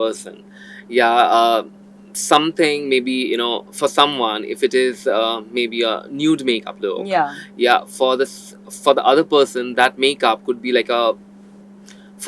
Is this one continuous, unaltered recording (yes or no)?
yes